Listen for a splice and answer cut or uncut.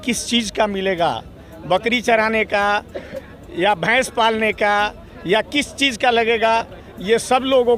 uncut